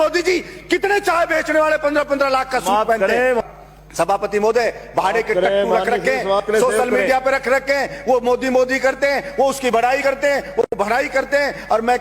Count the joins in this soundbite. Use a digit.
1